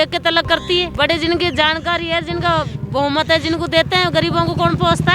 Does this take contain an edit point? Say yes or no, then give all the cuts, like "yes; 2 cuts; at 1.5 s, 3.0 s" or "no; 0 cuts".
no; 0 cuts